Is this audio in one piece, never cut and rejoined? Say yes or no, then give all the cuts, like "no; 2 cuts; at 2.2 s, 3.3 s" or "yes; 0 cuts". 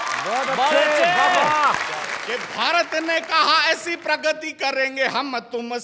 no; 1 cut; at 2.1 s